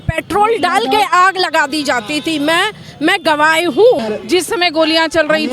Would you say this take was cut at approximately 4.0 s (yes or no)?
yes